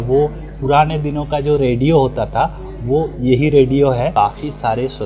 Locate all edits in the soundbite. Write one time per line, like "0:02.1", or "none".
0:04.1